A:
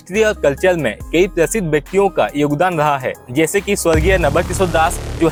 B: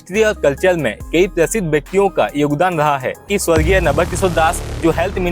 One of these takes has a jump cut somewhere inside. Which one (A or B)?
B